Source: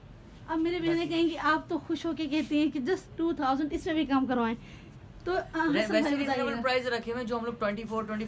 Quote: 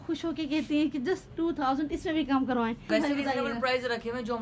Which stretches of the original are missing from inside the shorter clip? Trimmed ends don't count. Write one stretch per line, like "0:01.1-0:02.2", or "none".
0:04.7-0:05.9